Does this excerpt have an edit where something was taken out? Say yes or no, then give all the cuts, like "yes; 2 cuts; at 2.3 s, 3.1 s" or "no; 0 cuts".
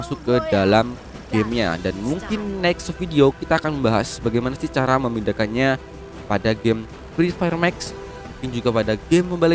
no; 0 cuts